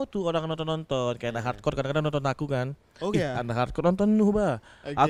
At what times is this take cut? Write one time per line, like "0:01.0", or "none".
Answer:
none